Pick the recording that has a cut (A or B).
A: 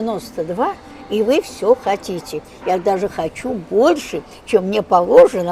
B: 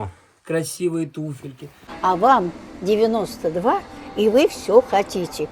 B